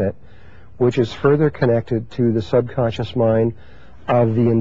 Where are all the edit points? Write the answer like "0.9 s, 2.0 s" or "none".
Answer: 1.9 s